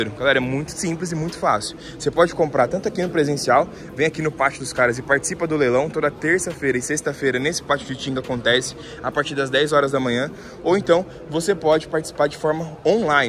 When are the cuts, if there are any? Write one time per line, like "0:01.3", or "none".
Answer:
none